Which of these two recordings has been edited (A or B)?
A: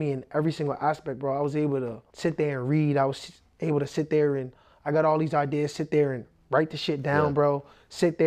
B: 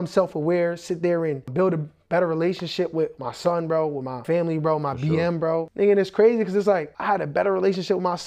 B